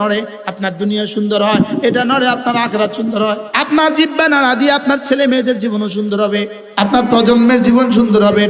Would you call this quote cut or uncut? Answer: cut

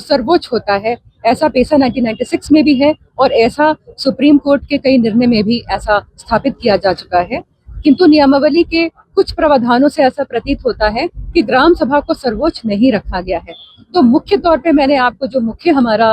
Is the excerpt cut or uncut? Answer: uncut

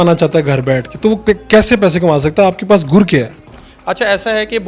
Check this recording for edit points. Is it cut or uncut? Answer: uncut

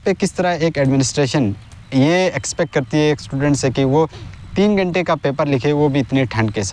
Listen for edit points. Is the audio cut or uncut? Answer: uncut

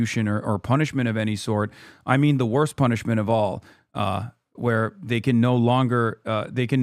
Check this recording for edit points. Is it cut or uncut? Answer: uncut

